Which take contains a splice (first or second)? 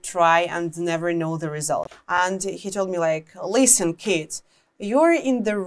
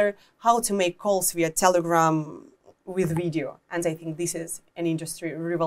first